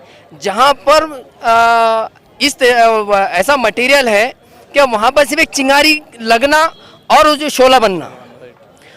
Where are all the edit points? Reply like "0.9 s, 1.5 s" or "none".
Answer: none